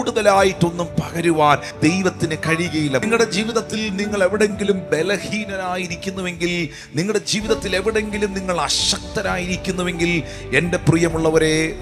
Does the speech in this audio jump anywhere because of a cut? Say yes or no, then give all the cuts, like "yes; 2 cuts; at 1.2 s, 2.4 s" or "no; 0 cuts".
yes; 2 cuts; at 1.7 s, 3.0 s